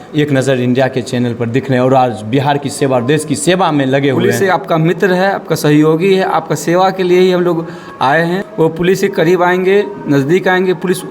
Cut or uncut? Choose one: cut